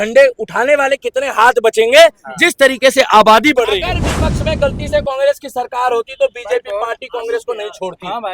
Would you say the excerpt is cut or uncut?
cut